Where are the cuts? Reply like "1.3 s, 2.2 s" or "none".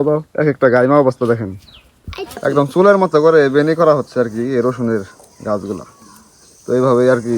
2.4 s